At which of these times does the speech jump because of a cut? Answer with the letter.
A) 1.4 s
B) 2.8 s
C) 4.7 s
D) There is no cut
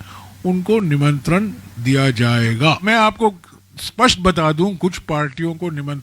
B